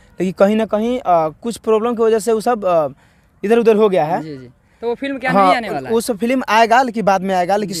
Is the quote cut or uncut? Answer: uncut